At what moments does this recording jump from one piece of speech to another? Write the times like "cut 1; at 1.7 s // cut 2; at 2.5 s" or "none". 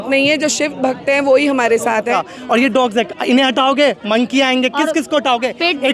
cut 1; at 2.1 s